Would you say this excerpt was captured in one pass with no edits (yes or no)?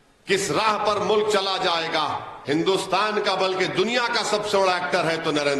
no